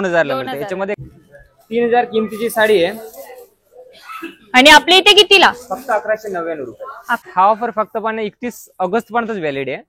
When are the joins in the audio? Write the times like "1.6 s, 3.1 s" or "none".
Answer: 1.0 s, 7.2 s

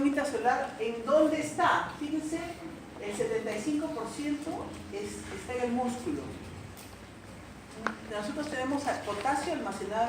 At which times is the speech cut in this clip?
2.1 s

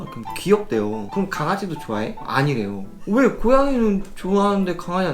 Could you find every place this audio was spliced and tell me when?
1.1 s, 2.9 s

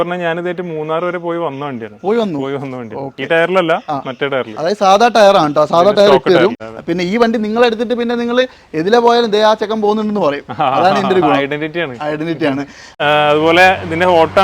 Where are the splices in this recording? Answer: 6.7 s, 13.0 s

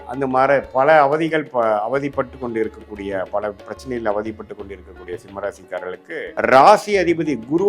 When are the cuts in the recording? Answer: 6.3 s

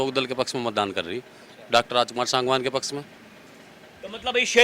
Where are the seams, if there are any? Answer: none

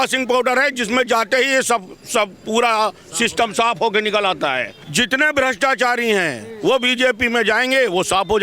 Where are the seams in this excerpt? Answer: 4.8 s

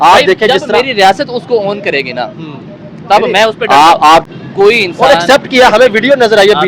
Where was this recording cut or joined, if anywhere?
4.3 s

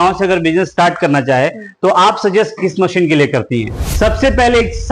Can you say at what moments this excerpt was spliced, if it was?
3.9 s

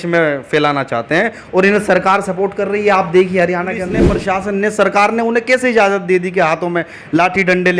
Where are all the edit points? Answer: 4.1 s

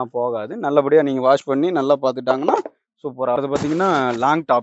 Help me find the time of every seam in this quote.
3.4 s

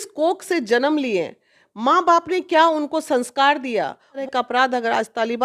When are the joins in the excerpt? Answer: 4.2 s

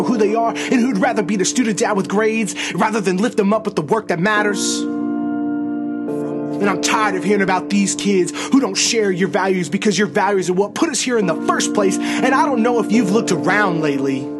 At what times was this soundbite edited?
none

